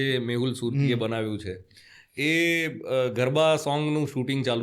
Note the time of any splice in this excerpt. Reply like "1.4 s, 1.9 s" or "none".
none

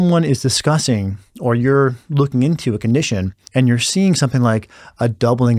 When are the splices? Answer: 3.4 s

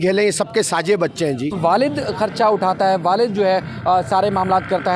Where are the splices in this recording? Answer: 1.5 s

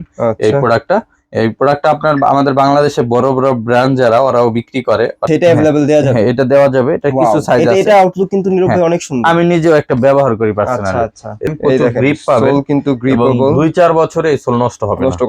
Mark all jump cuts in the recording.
5.2 s, 11.5 s

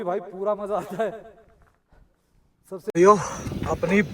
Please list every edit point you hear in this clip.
2.9 s

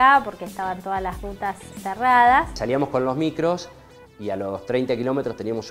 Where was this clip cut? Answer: 1.7 s, 2.5 s

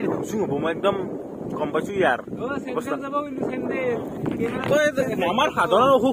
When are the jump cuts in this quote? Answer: none

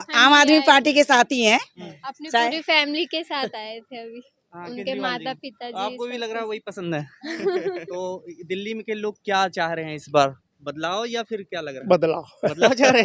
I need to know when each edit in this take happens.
none

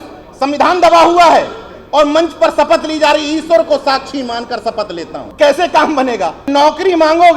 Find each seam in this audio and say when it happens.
5.3 s, 6.4 s

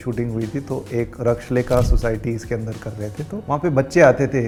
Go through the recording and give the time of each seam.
none

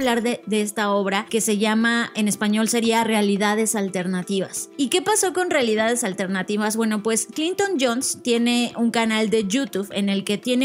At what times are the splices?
1.2 s, 4.6 s

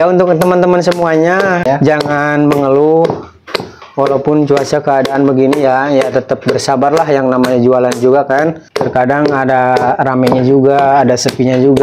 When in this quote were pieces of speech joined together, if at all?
1.6 s, 8.7 s

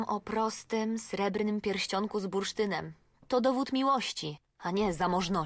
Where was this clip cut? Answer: none

